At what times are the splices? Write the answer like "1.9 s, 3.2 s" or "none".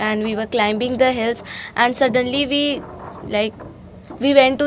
none